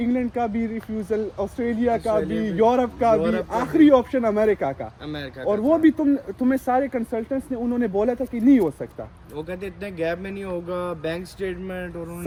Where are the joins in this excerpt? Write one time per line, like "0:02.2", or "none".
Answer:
none